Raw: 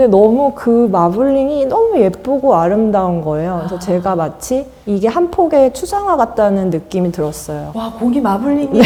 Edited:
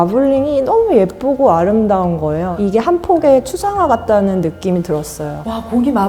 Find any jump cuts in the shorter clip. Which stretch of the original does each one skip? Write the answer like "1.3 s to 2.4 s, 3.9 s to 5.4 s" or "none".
3.5 s to 4.8 s